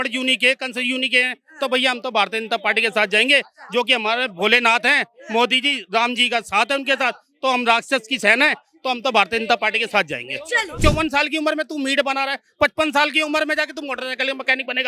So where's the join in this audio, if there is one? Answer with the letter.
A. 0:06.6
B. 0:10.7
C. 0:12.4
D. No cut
B